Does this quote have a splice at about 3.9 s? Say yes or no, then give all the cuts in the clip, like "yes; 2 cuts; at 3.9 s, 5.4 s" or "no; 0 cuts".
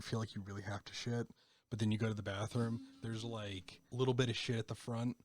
yes; 1 cut; at 3.9 s